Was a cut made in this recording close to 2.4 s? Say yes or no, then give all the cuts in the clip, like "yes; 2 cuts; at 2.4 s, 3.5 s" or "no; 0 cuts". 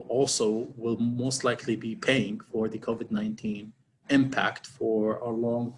no; 0 cuts